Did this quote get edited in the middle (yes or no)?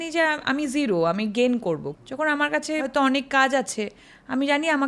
yes